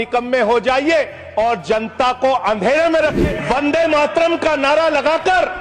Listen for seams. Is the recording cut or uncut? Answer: cut